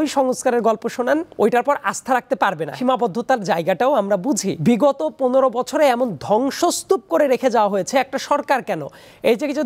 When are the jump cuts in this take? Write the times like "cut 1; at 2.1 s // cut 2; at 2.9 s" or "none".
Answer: cut 1; at 1.3 s // cut 2; at 2.7 s // cut 3; at 4.5 s